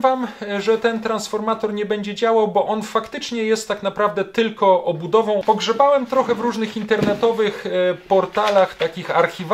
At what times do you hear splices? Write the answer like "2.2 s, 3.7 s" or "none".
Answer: 5.4 s